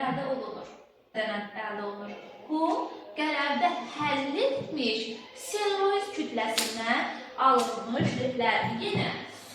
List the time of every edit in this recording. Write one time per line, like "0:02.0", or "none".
0:01.1